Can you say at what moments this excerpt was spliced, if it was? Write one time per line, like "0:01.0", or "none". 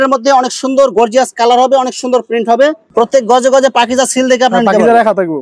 none